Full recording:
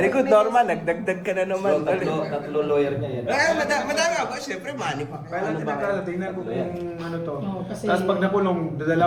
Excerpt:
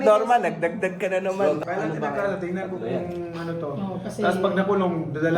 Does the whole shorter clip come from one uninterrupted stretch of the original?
no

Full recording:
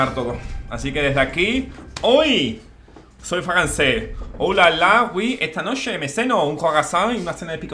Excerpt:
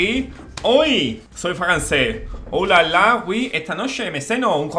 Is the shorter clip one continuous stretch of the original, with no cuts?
no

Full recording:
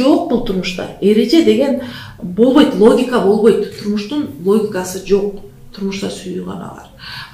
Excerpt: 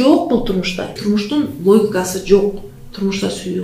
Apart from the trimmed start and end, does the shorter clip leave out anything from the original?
yes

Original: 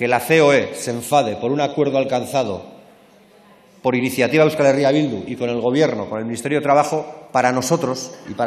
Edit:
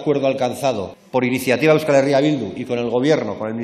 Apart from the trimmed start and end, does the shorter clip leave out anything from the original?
yes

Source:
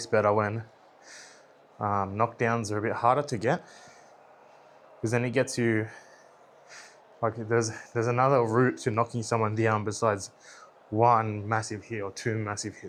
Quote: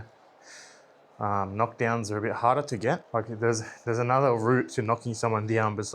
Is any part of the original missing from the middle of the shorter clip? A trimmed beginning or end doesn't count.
yes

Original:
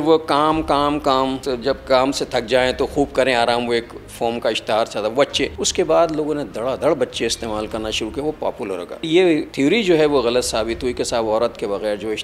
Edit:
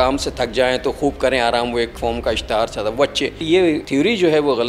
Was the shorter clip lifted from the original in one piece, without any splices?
no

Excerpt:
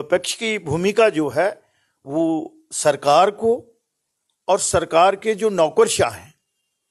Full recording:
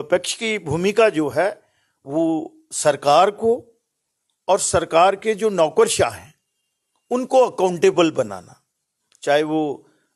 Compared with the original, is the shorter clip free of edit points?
yes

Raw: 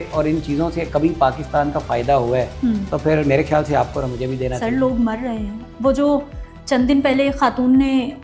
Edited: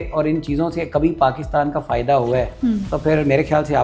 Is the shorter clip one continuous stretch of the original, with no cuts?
yes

